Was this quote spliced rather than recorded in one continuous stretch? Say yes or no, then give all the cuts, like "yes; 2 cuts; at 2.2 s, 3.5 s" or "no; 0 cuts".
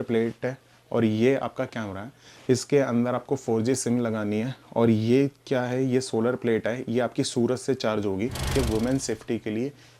yes; 1 cut; at 8.5 s